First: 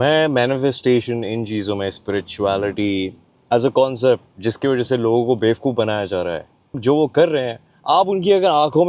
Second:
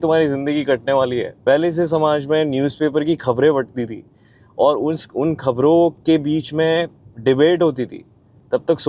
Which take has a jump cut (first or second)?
first